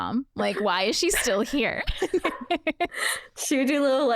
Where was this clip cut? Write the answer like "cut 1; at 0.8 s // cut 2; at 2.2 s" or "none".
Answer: none